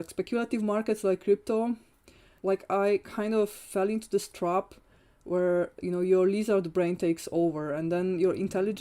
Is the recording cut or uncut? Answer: cut